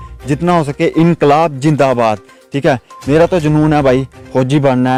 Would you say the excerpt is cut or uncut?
uncut